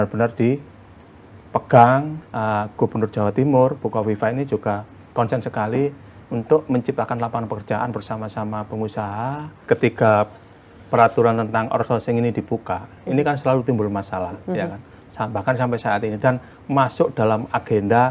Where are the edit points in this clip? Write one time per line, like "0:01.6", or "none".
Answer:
0:02.2
0:09.6